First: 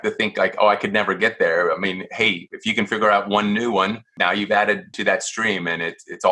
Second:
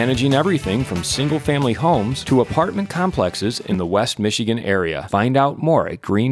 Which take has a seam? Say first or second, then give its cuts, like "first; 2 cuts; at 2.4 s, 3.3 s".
first; 2 cuts; at 4.1 s, 4.9 s